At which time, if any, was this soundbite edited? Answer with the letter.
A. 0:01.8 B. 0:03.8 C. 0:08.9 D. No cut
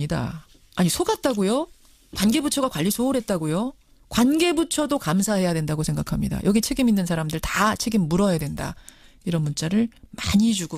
A